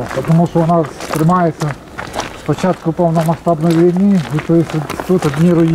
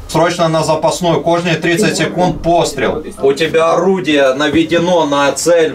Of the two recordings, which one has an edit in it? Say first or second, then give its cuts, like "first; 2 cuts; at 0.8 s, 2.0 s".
second; 1 cut; at 3.2 s